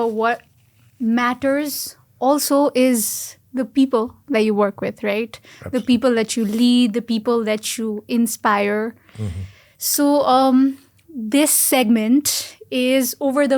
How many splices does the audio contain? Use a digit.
0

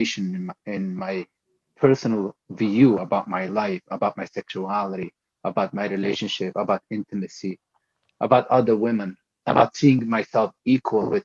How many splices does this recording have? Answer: 0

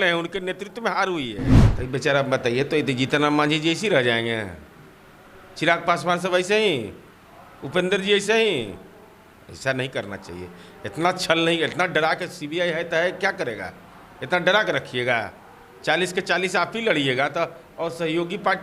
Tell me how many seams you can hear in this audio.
1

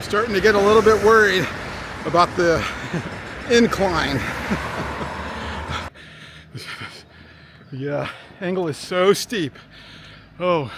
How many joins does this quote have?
1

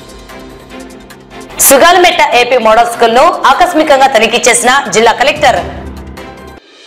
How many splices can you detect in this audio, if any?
0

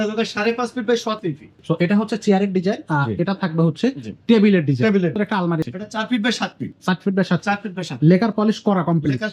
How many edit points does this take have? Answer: 2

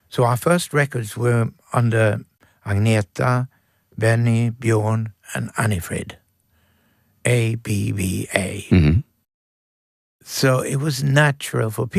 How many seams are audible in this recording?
0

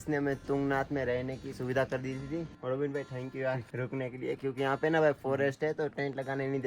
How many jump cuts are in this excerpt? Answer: 2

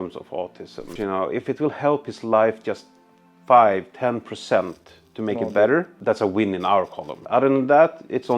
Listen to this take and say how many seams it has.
3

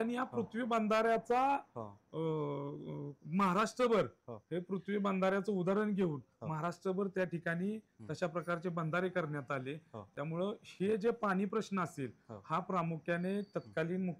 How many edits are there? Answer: 0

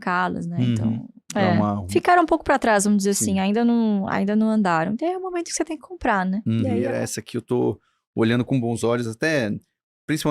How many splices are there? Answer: 2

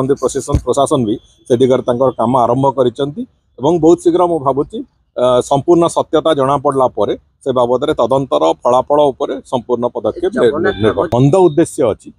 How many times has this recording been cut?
1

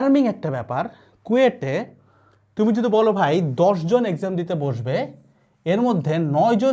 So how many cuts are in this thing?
0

